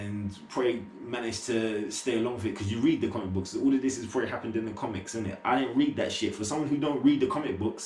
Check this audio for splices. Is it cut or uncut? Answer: uncut